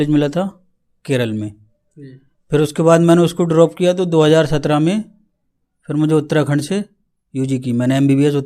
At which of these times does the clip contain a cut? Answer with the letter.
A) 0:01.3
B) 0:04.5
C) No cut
C